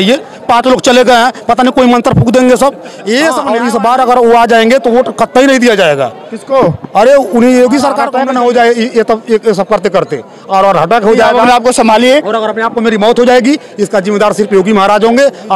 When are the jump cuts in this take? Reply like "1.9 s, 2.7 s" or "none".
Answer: 3.4 s, 8.1 s